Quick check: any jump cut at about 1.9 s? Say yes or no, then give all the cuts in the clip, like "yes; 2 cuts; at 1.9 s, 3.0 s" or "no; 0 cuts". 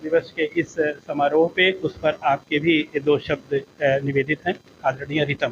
yes; 1 cut; at 1.9 s